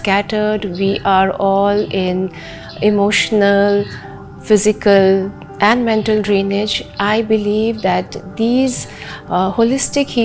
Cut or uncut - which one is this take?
uncut